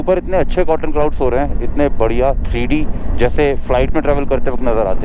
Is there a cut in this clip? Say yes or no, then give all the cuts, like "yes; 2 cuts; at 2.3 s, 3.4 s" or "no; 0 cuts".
no; 0 cuts